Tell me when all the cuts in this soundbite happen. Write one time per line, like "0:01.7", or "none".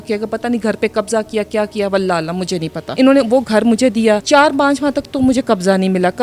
0:02.8
0:04.2